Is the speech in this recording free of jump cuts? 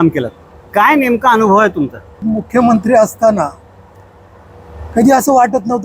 no; 1 cut; at 2.2 s

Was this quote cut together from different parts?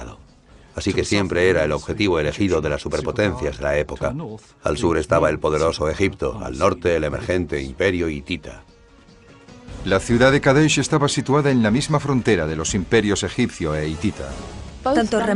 no; 0 cuts

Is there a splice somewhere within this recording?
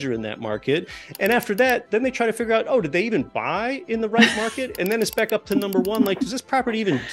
yes; 1 cut; at 1.8 s

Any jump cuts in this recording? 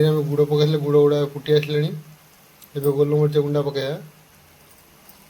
no; 0 cuts

